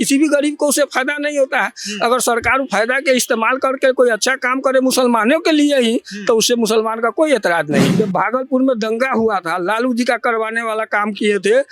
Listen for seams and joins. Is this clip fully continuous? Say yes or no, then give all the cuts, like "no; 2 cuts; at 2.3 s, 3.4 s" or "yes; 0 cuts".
no; 1 cut; at 7.9 s